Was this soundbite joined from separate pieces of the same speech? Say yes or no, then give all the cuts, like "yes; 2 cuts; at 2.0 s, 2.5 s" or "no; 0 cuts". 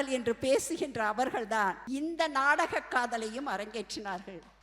yes; 1 cut; at 1.8 s